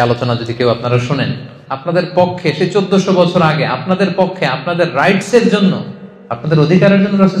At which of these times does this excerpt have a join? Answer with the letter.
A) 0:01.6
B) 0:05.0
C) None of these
A